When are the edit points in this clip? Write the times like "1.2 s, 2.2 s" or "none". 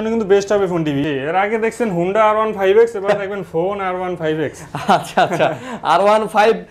1.0 s